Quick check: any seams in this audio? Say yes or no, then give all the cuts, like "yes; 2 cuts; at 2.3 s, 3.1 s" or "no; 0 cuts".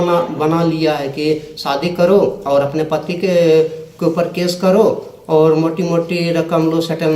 no; 0 cuts